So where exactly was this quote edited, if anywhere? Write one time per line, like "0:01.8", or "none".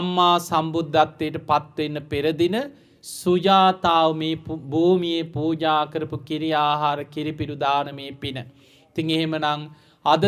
none